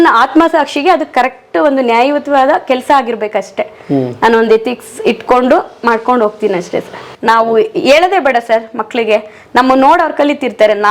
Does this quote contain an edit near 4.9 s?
no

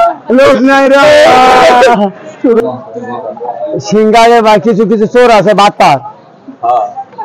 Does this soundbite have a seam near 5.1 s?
no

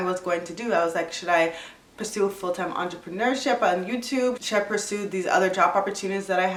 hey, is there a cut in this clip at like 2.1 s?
no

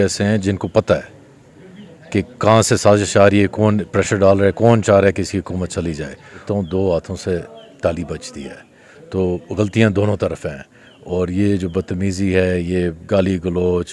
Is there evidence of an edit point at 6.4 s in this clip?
yes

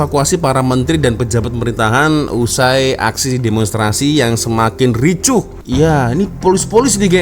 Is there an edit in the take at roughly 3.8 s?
no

